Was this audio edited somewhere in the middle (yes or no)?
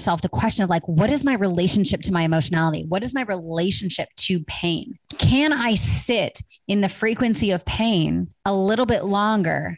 yes